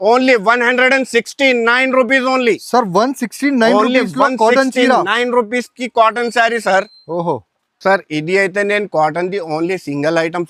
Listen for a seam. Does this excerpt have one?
no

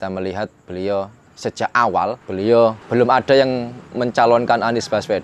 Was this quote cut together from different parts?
yes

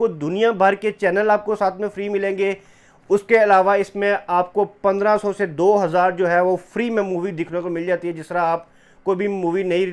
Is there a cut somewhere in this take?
no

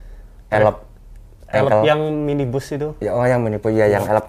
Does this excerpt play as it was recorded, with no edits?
yes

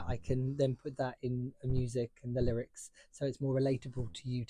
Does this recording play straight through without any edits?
yes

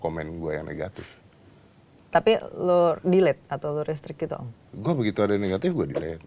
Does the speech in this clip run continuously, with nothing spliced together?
yes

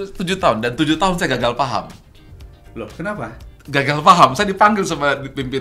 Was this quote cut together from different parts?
no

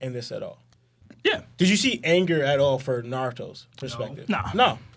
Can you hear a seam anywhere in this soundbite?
no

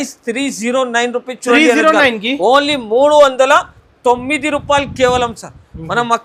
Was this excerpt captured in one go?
yes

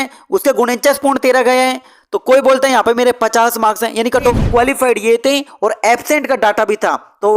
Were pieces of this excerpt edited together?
yes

